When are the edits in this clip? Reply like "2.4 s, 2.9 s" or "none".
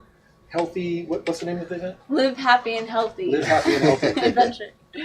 1.4 s